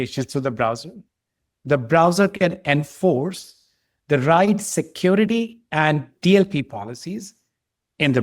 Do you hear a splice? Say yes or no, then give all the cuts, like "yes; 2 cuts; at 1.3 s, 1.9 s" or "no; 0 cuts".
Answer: yes; 1 cut; at 6.1 s